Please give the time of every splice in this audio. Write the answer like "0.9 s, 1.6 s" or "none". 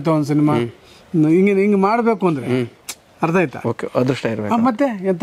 none